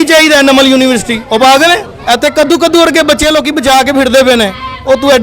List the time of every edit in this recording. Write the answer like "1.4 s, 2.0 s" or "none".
1.9 s

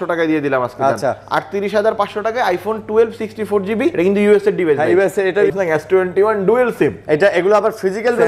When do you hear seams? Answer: 3.9 s, 5.5 s

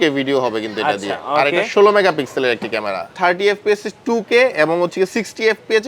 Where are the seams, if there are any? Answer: 3.1 s

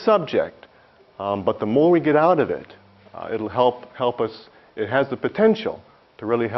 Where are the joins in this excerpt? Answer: 1.4 s

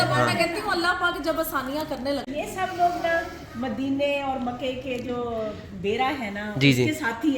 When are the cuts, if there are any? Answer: 2.3 s

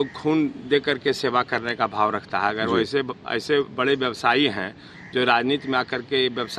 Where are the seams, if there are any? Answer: none

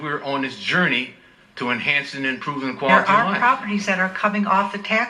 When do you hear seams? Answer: 3.0 s

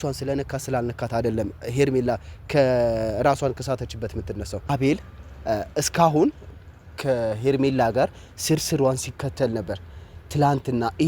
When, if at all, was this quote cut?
4.7 s

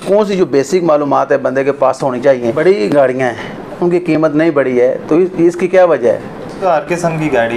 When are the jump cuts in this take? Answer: 2.5 s, 6.6 s

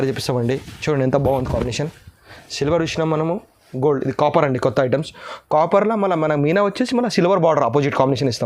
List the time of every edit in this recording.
none

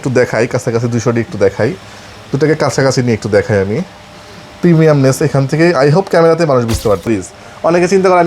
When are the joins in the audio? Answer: 7.1 s

